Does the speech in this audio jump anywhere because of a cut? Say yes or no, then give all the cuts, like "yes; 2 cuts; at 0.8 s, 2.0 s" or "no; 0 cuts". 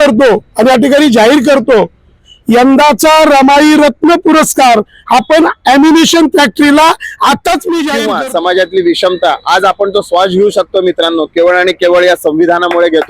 yes; 2 cuts; at 2.3 s, 8.0 s